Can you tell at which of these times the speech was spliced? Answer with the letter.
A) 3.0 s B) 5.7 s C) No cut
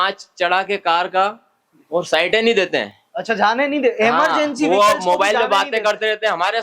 C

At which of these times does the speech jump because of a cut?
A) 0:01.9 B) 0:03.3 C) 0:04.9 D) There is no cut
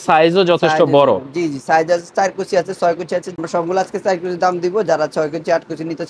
B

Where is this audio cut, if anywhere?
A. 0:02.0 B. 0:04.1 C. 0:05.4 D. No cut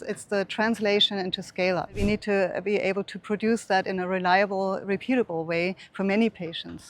A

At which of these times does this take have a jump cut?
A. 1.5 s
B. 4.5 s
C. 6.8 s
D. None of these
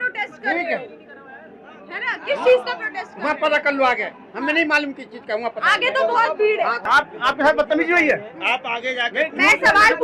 C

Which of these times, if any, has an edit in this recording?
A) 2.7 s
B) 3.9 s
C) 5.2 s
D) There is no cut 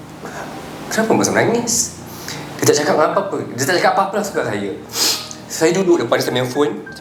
D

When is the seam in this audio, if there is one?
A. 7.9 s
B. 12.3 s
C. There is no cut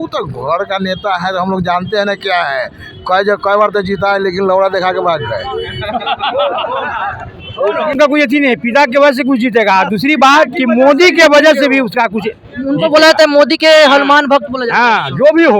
A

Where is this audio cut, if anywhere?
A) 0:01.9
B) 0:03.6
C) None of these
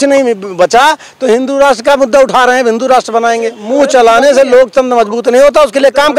B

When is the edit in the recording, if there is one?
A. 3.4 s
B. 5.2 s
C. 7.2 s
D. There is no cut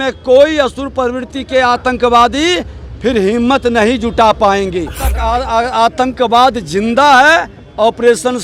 B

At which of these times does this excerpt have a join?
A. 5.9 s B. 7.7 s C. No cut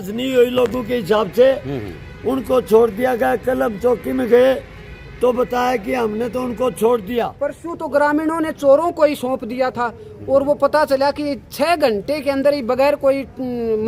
B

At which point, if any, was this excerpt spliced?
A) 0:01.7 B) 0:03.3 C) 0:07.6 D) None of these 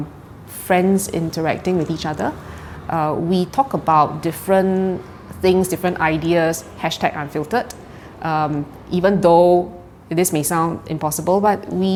D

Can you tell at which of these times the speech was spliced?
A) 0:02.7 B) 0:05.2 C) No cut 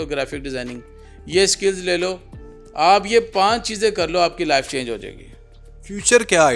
C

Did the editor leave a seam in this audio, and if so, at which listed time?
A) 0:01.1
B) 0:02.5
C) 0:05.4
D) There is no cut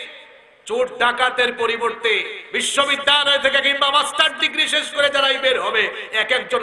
D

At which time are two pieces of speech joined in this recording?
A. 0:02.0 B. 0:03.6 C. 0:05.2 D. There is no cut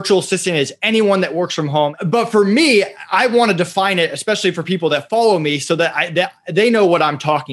A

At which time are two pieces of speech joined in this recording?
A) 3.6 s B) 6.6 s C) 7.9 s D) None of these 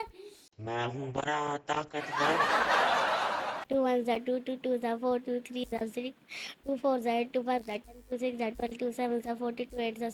A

